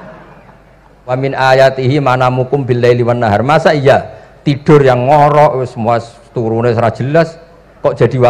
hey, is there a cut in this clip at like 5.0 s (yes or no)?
no